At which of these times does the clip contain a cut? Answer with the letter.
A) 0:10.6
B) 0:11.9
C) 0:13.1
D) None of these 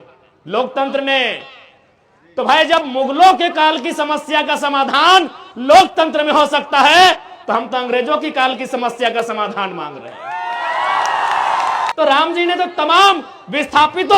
B